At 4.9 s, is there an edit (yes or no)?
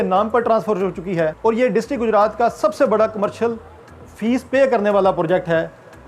no